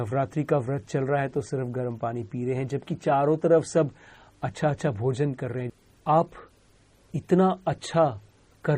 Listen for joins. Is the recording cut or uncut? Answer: cut